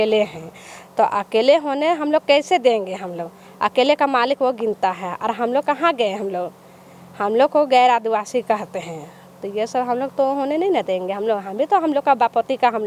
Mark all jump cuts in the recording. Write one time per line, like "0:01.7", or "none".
none